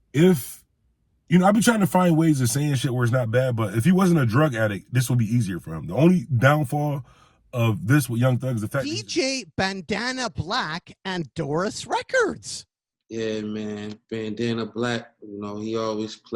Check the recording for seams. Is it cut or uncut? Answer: cut